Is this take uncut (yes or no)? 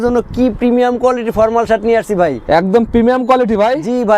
yes